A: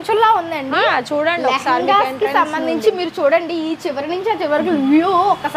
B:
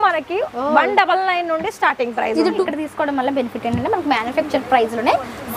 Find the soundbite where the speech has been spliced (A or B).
B